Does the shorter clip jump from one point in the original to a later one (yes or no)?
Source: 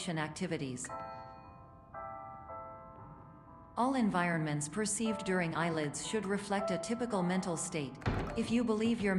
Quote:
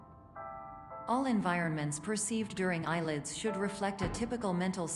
yes